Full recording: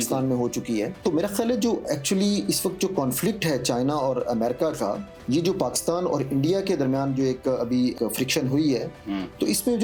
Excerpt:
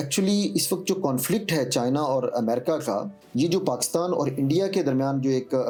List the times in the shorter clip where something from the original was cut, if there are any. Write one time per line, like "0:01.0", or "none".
none